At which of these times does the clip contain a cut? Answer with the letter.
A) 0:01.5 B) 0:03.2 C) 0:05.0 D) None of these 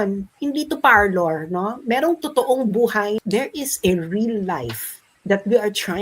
B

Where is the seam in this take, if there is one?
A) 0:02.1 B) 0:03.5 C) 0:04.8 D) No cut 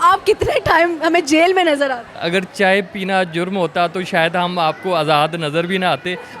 A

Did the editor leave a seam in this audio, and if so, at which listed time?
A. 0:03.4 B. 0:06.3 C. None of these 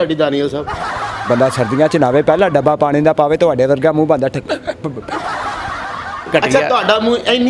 B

